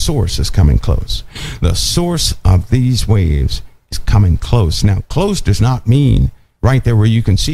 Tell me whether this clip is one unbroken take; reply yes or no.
yes